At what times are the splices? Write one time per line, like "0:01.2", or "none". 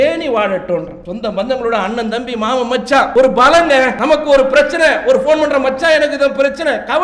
0:01.0
0:03.1
0:04.0